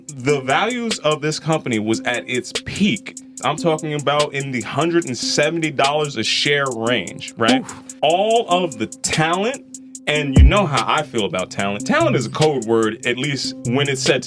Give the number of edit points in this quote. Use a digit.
2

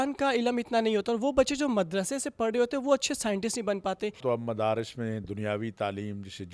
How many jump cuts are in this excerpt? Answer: 1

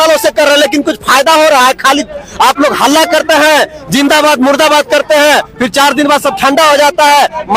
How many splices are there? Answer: 0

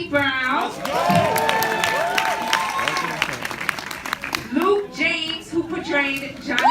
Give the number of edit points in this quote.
1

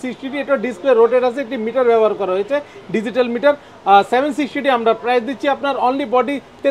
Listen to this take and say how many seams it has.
0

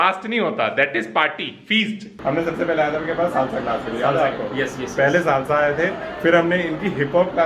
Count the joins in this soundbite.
1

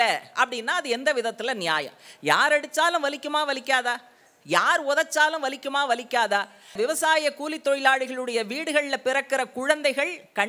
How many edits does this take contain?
1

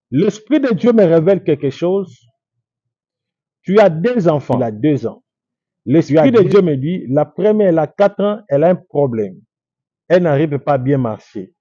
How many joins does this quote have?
1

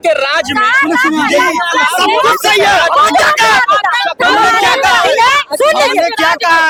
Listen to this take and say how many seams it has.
0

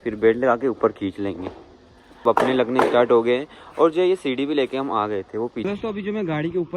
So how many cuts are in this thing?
2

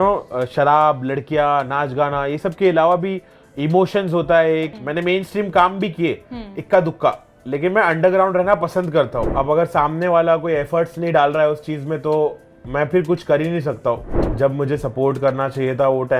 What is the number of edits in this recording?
3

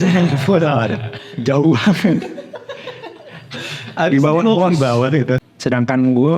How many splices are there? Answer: 1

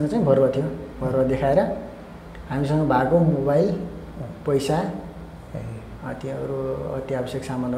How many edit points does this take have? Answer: 0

